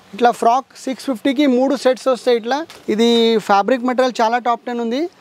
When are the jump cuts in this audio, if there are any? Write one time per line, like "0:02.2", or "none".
0:02.7